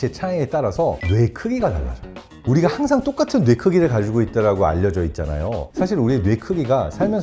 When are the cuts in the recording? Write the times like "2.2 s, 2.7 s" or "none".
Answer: 1.0 s, 5.7 s